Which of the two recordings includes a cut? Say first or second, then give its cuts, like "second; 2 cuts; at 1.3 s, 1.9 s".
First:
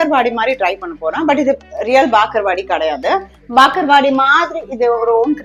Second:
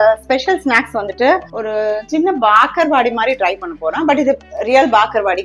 second; 1 cut; at 1.5 s